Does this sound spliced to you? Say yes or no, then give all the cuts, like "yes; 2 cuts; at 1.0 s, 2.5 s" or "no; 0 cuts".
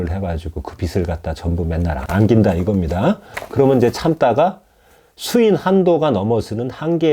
yes; 1 cut; at 2.0 s